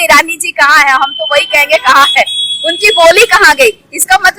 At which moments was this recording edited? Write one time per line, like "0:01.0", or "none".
none